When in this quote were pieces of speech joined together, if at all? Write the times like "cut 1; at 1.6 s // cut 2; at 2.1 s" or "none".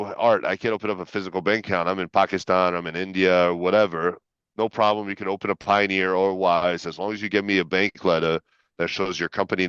none